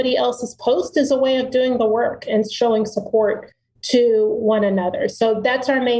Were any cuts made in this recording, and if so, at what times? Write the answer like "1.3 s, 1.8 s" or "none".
none